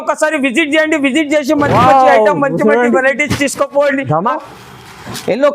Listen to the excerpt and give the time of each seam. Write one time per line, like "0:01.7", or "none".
0:04.4